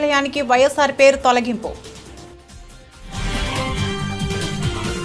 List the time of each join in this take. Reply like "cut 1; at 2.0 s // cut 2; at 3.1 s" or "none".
cut 1; at 1.9 s